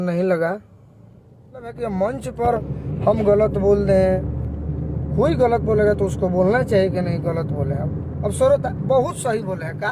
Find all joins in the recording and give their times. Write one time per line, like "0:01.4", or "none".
0:01.7